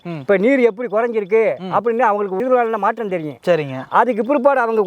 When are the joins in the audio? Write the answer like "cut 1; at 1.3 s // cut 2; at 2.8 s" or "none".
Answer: none